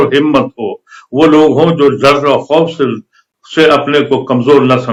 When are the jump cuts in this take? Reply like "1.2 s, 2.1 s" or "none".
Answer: none